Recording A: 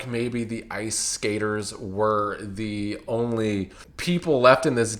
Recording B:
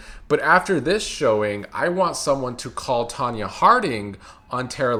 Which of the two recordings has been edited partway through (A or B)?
A